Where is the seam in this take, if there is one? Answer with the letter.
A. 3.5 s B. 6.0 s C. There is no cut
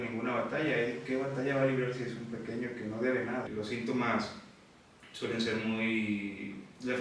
A